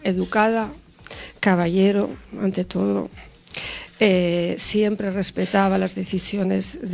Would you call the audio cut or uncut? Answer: uncut